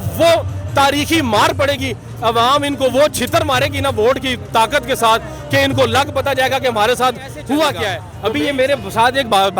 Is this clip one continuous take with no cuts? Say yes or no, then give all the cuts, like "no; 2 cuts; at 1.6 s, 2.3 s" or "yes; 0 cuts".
no; 1 cut; at 8.1 s